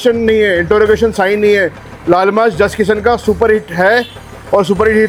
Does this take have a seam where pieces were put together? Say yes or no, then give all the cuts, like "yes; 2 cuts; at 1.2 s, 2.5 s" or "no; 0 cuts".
no; 0 cuts